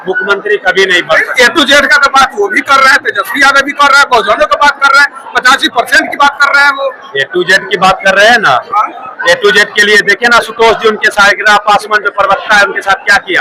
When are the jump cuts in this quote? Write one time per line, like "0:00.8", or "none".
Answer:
none

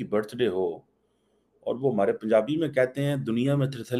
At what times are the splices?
none

